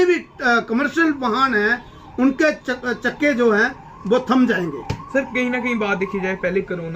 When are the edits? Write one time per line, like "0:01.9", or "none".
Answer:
none

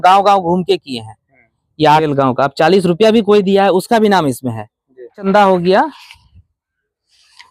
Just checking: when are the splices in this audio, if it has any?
0:02.0
0:05.3

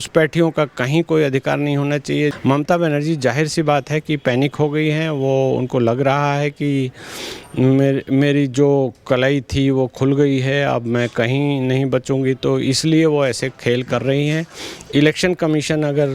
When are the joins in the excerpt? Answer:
0:02.3

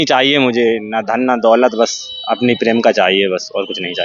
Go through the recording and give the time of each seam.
none

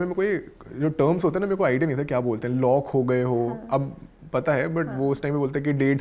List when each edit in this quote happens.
none

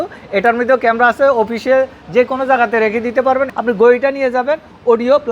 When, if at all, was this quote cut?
0:03.5

